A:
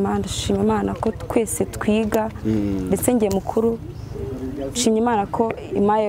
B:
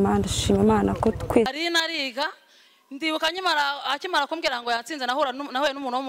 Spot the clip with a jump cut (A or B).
B